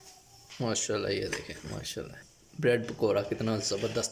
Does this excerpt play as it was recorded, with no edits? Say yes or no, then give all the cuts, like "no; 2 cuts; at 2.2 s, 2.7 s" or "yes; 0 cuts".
yes; 0 cuts